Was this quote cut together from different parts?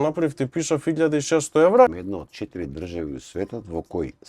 yes; 1 cut; at 2.0 s

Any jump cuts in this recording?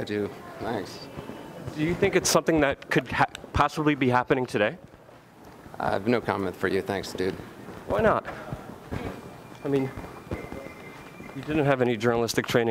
yes; 1 cut; at 9.8 s

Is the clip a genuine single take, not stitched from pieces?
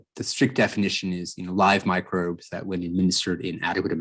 yes; 0 cuts

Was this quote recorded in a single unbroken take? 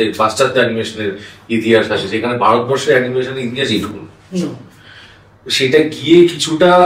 yes; 0 cuts

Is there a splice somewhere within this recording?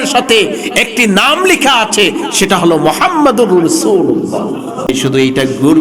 yes; 1 cut; at 4.9 s

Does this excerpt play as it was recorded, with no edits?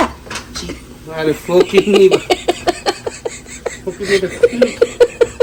yes; 0 cuts

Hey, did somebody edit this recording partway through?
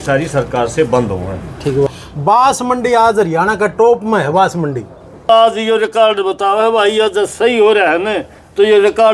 yes; 2 cuts; at 1.9 s, 5.3 s

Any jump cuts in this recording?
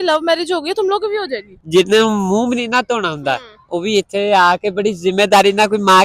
yes; 1 cut; at 1.5 s

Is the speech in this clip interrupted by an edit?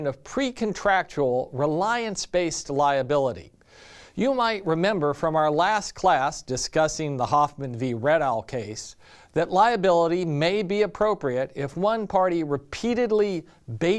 no; 0 cuts

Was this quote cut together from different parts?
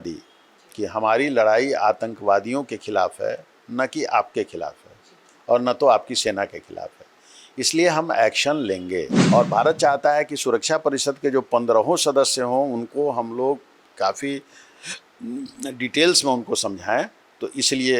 yes; 1 cut; at 9.2 s

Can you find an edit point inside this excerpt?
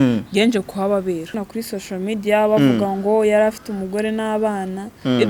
yes; 1 cut; at 1.4 s

